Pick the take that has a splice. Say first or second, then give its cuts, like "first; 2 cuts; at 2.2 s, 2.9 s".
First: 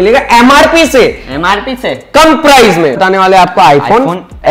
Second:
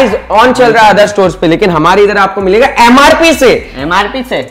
first; 1 cut; at 3.0 s